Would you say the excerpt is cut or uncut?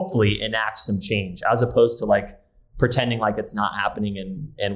uncut